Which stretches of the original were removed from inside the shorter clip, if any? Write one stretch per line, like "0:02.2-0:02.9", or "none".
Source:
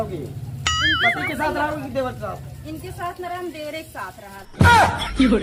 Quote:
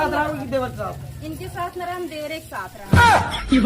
0:04.2-0:04.4